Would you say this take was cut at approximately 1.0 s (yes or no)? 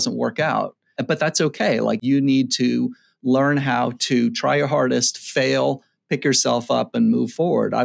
yes